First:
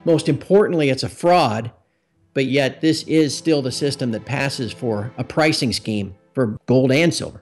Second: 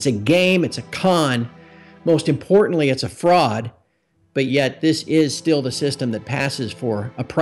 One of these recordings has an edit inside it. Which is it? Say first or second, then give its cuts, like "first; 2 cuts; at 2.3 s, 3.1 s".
first; 1 cut; at 6.5 s